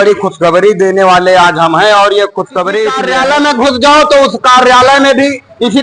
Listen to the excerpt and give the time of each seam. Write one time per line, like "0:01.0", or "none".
0:03.1